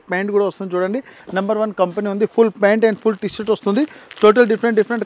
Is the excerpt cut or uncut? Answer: cut